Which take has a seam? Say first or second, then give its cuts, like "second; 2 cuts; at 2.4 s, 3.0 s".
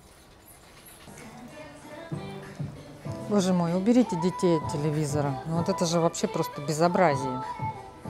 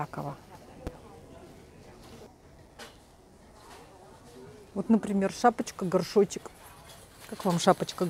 first; 1 cut; at 1.0 s